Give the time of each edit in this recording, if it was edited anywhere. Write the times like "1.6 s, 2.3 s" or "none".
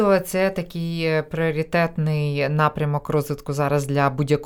none